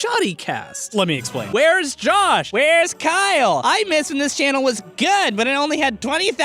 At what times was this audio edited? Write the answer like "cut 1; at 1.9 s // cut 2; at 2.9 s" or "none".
cut 1; at 1.5 s